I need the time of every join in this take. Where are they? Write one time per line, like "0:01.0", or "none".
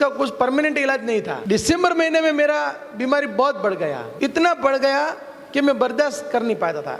0:01.4
0:04.1